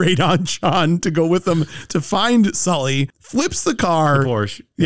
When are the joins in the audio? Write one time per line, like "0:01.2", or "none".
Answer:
none